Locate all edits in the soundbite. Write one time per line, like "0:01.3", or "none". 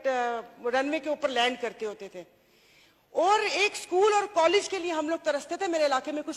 none